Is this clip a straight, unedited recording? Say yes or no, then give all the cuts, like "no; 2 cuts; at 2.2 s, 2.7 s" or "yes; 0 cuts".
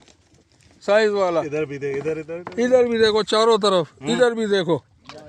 yes; 0 cuts